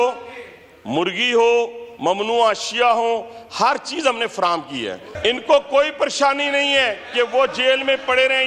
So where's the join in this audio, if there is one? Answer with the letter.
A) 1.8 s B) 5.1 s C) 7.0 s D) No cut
B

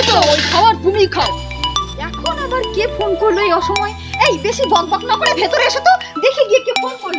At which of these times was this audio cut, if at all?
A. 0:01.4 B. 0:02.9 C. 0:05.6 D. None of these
A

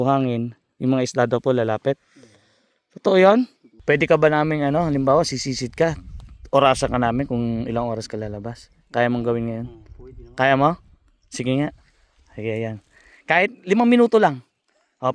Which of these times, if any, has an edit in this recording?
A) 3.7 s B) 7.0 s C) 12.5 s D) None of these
A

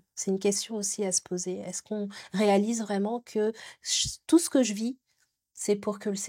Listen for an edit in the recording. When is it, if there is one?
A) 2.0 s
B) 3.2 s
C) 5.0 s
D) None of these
D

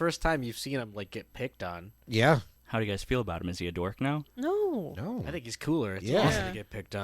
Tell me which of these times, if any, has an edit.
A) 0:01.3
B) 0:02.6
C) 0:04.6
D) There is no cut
B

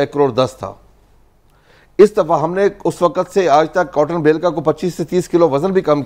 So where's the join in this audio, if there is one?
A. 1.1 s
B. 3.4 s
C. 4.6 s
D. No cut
D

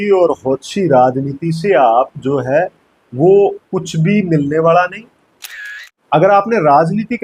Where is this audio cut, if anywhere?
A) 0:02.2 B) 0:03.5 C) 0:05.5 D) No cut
C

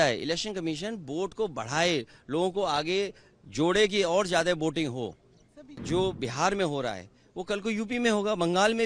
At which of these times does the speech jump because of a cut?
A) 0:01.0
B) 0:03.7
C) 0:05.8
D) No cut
C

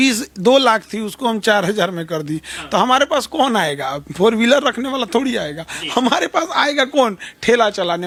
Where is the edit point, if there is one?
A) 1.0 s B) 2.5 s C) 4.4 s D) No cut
D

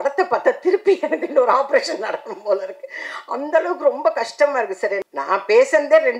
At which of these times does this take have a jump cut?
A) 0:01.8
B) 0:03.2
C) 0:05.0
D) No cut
C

